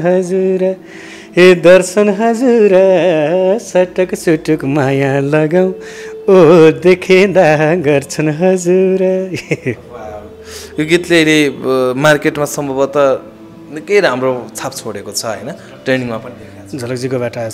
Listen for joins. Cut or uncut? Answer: uncut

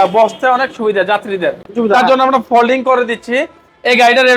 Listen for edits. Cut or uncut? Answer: uncut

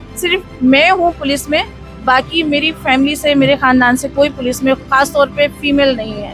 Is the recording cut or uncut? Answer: uncut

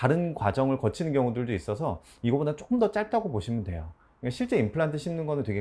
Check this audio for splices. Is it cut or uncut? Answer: uncut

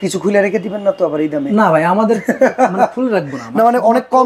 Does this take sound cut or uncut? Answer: uncut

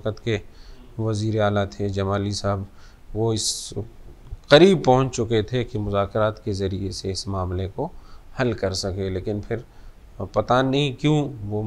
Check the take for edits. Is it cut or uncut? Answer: uncut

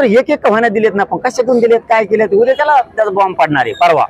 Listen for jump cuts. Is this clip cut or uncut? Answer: uncut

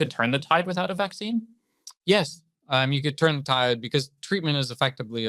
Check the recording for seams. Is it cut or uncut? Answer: uncut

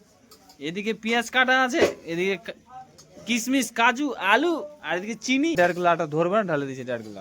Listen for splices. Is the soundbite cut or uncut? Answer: cut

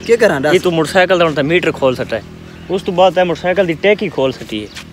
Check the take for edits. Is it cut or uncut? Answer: uncut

